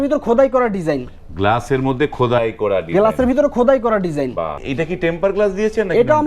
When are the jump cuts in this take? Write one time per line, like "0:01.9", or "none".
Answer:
0:04.6